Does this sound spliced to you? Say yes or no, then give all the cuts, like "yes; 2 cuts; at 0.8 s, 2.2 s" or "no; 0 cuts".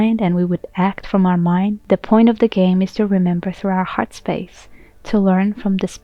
yes; 1 cut; at 1.8 s